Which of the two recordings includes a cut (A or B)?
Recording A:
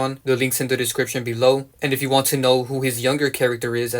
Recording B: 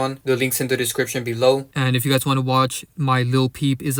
A